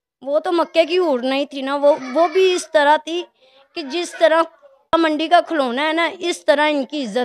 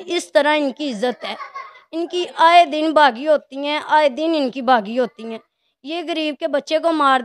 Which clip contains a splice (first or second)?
first